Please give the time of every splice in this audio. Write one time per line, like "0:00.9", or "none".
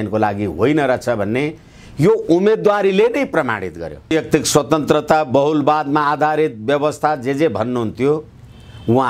0:04.1